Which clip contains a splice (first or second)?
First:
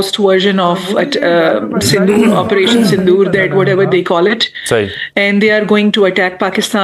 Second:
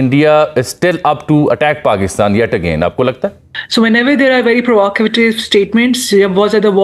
second